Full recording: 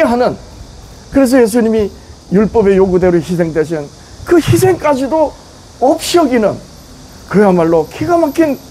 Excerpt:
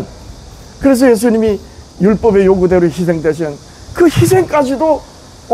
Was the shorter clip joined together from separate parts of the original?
no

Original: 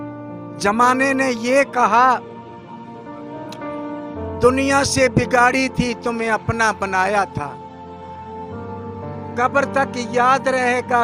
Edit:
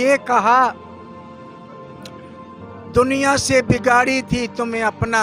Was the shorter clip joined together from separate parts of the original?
no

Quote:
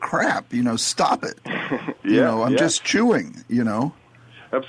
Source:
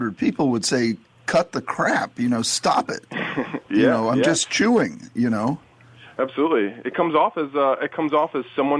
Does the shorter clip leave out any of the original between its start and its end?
no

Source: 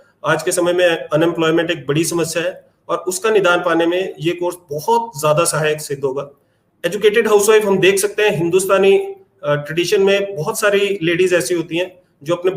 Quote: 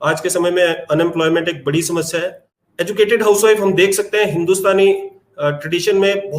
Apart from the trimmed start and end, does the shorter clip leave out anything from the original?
yes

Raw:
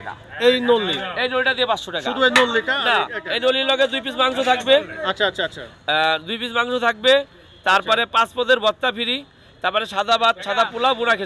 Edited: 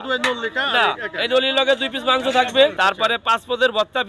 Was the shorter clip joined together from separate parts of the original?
yes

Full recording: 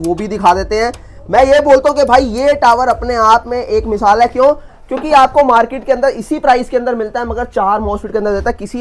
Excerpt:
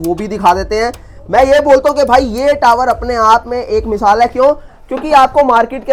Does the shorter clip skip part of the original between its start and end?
no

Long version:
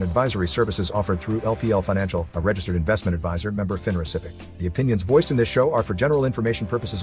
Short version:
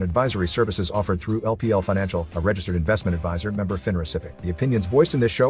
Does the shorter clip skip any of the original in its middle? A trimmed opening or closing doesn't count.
yes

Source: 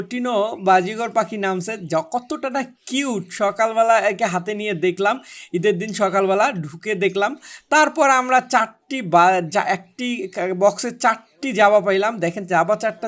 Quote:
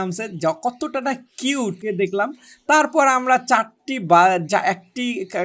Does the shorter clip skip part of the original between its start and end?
yes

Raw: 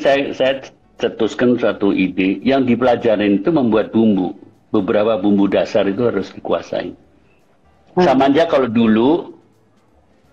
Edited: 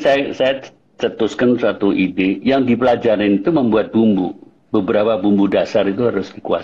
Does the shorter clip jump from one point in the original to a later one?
no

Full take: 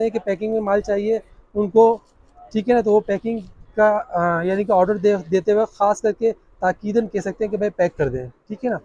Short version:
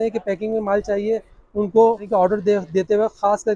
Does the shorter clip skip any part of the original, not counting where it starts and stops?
yes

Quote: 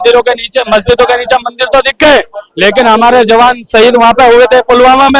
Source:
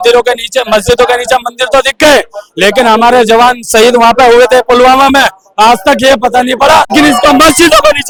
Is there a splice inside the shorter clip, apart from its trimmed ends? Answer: no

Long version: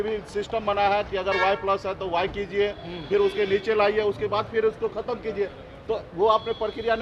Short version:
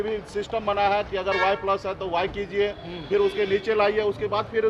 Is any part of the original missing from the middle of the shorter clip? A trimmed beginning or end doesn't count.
no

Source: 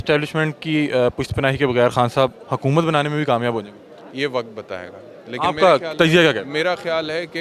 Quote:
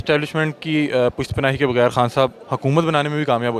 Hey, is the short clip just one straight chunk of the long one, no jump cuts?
yes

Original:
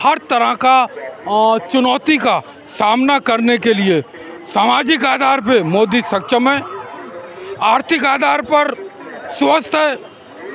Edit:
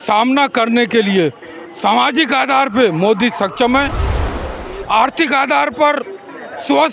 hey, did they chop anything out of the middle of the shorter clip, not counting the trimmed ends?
no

